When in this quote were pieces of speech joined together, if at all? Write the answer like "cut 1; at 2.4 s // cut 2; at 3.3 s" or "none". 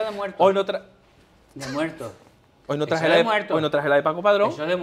none